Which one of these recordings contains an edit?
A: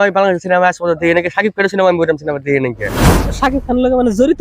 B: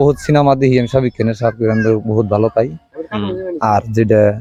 A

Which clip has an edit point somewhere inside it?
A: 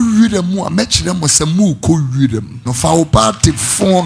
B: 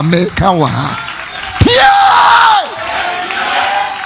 A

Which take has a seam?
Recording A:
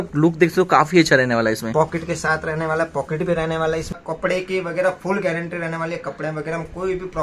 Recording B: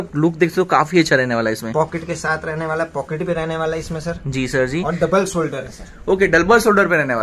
A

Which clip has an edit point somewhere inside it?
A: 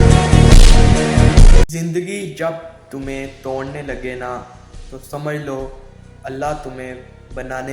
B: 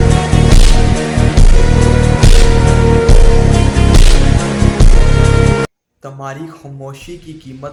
A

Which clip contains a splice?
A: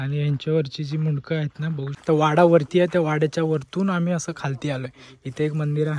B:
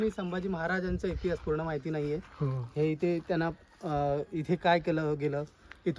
A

